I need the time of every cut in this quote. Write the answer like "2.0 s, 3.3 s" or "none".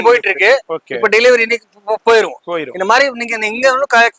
none